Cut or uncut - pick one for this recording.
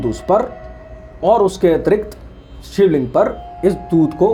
uncut